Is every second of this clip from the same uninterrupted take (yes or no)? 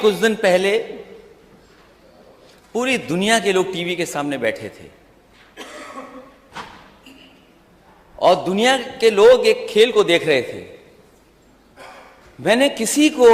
yes